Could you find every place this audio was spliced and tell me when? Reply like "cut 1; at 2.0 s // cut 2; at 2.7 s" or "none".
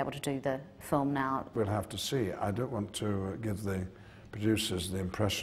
cut 1; at 1.5 s